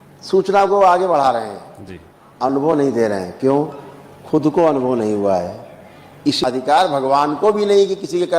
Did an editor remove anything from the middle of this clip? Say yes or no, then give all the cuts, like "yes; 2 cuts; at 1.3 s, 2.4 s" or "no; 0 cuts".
yes; 1 cut; at 6.4 s